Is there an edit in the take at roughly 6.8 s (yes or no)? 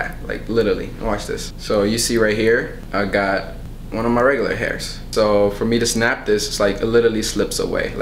no